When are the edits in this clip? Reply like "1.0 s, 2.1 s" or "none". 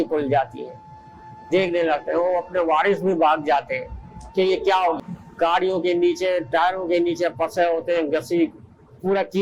5.1 s